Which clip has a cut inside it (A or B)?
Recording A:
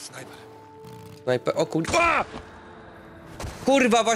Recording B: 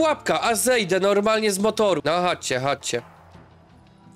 B